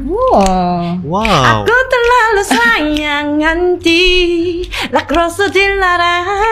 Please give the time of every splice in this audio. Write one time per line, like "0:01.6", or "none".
none